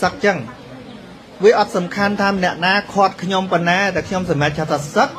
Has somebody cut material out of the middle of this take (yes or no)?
no